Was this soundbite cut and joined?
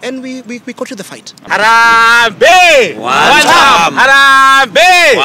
yes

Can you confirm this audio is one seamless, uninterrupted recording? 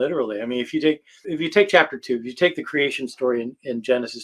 no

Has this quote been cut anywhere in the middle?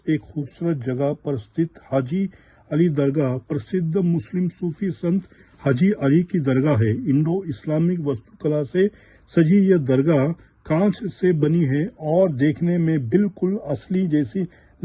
no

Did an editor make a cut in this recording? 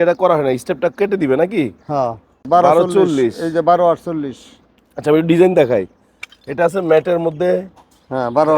yes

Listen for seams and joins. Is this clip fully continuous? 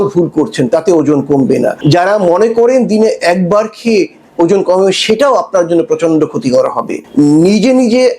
no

